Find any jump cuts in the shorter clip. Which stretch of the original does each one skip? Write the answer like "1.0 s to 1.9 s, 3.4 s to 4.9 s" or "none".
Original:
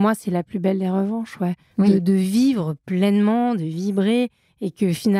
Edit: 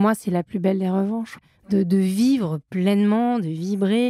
1.5 s to 1.7 s